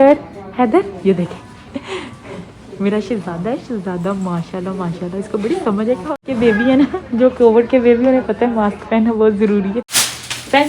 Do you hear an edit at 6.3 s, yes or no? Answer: yes